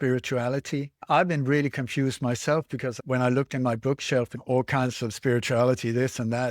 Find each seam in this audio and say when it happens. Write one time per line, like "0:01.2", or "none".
0:01.0
0:03.0
0:04.4